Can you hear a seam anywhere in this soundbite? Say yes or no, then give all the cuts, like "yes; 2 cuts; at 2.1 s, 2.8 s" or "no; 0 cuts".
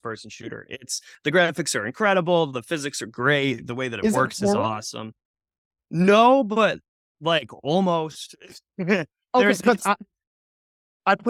no; 0 cuts